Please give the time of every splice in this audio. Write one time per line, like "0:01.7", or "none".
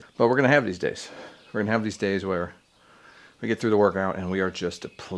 none